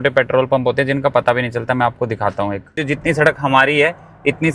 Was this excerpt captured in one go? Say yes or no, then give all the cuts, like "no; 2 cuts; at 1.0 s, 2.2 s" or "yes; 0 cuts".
no; 1 cut; at 2.8 s